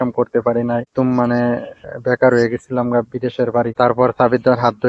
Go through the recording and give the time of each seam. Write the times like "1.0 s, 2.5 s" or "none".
0.9 s, 3.7 s

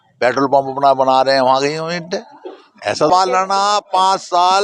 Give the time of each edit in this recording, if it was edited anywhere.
3.1 s

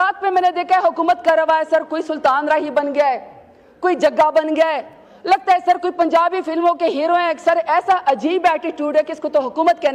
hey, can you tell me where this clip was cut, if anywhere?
none

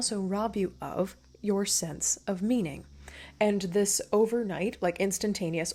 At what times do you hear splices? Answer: none

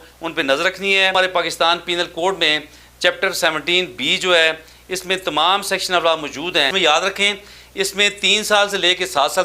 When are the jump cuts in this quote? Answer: 1.1 s, 6.7 s

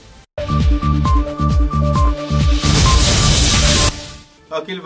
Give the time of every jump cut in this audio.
3.9 s

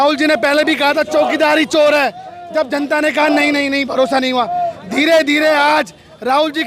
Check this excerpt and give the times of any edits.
none

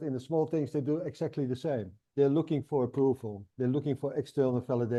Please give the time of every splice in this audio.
none

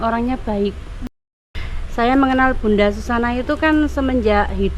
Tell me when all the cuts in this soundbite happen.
1.1 s

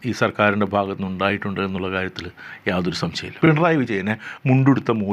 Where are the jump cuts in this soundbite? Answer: 3.3 s

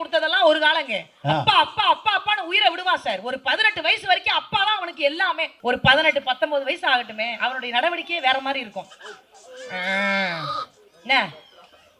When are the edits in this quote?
5.5 s

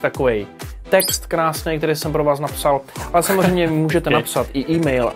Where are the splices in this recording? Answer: 3.0 s

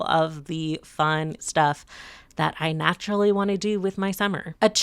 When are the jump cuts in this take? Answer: 1.4 s

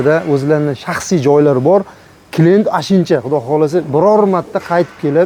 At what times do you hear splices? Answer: none

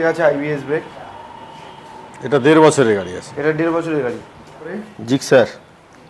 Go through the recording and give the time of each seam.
4.9 s

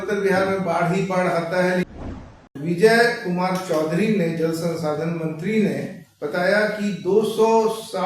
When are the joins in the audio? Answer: 2.2 s

